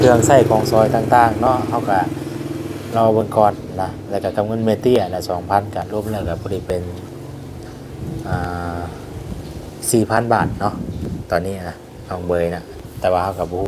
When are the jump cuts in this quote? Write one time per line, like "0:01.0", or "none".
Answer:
none